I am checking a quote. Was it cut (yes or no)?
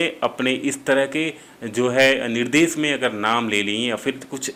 no